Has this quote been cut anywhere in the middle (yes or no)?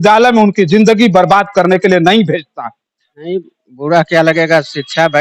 yes